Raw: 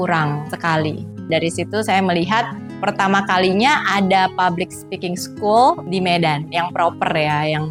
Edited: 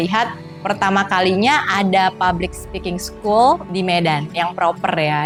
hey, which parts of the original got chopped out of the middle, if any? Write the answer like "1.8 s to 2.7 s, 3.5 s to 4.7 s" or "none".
none